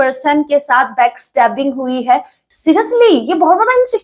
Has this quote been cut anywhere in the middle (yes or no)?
yes